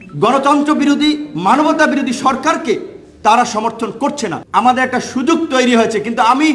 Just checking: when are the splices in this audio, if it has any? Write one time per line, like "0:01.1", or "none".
0:04.3

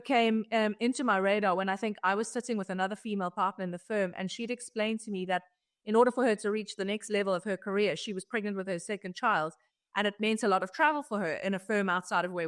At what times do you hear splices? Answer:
none

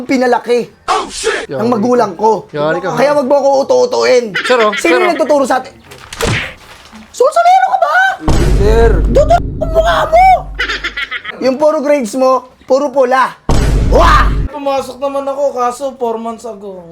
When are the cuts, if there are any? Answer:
0:11.3
0:14.5

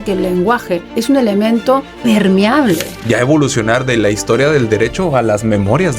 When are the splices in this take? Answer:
0:00.9
0:01.9
0:02.9

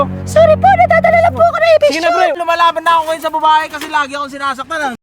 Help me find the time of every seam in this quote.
0:02.4

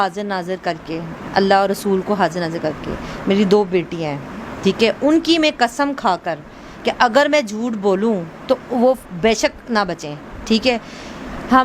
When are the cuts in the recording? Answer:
0:01.1

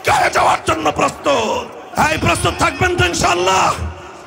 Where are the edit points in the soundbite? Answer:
0:01.9

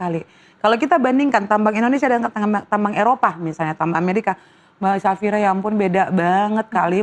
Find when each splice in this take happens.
none

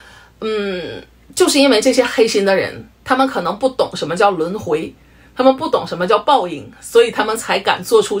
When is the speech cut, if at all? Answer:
none

